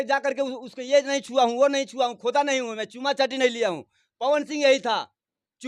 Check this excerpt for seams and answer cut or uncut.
uncut